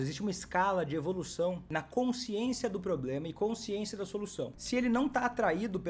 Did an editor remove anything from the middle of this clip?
yes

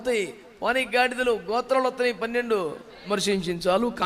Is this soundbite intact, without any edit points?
no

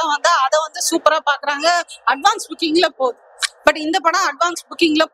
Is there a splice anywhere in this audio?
no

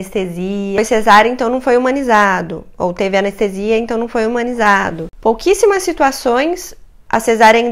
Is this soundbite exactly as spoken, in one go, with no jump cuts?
no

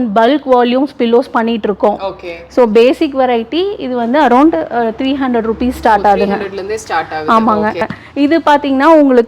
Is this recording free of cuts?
no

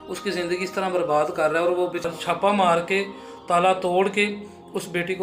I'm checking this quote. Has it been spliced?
yes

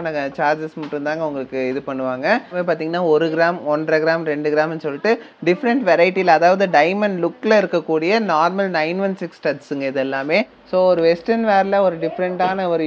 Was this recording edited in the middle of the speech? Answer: yes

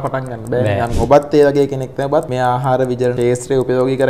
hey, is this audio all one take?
no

